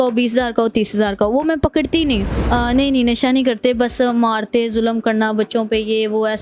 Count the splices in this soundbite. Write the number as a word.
one